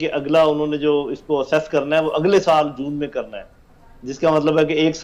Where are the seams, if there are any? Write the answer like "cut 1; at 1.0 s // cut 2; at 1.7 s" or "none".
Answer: none